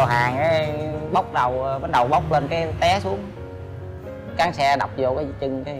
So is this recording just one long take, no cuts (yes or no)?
yes